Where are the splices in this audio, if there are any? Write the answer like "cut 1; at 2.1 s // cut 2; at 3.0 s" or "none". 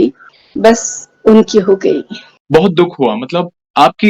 cut 1; at 2.3 s

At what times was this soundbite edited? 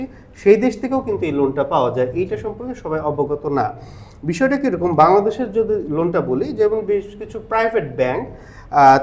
none

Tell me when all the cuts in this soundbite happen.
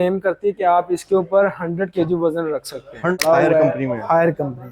cut 1; at 3.2 s

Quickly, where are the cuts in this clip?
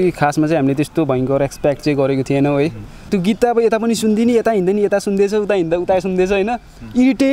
cut 1; at 3.1 s

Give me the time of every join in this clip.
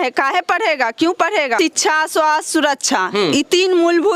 cut 1; at 1.5 s

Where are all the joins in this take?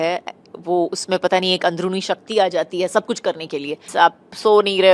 cut 1; at 3.8 s

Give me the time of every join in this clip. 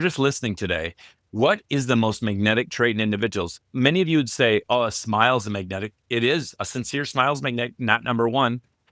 none

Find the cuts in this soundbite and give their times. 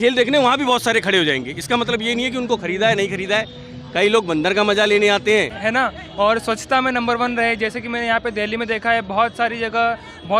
cut 1; at 5.5 s

